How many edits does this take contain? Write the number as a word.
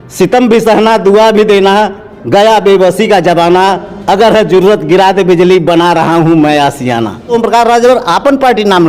one